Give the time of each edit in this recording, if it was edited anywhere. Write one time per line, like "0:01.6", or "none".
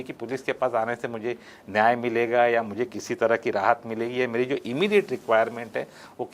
none